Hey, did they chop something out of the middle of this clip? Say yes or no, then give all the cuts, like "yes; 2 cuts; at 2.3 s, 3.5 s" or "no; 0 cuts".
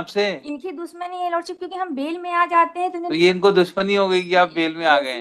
no; 0 cuts